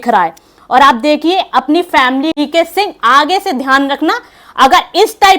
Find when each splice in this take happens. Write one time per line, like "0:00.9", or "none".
0:02.3